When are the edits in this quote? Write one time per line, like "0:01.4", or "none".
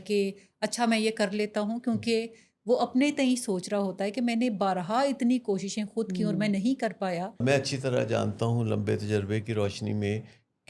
0:07.4